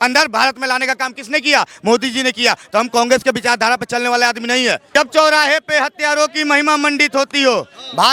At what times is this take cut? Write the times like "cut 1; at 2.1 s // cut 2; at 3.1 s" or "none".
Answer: cut 1; at 4.9 s

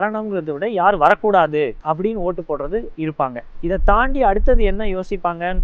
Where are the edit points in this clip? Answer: cut 1; at 1.8 s // cut 2; at 3.5 s

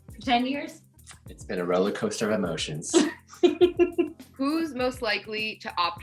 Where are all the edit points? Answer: cut 1; at 4.2 s

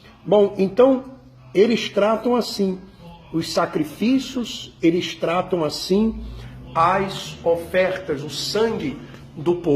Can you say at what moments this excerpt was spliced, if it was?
cut 1; at 6.0 s

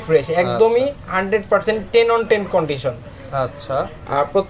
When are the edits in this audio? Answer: none

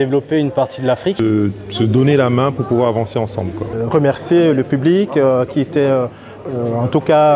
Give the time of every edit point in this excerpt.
cut 1; at 1.2 s // cut 2; at 3.7 s

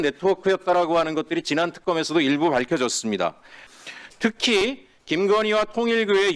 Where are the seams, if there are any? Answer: cut 1; at 3.6 s

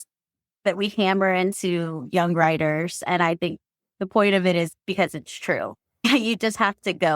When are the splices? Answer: cut 1; at 6.0 s

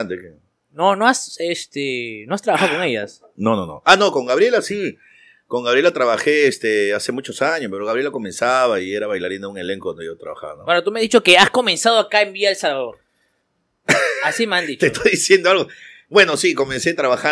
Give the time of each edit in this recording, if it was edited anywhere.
none

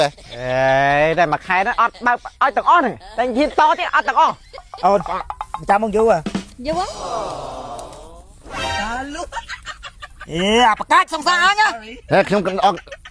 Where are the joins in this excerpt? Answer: cut 1; at 4.5 s

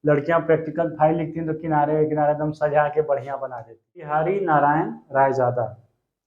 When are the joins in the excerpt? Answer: cut 1; at 4.1 s

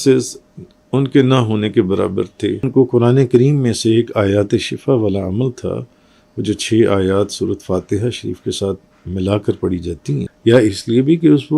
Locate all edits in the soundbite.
cut 1; at 2.7 s // cut 2; at 10.3 s

